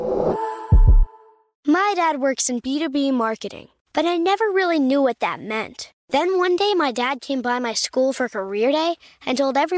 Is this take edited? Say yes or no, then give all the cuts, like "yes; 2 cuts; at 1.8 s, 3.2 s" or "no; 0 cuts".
yes; 1 cut; at 1.2 s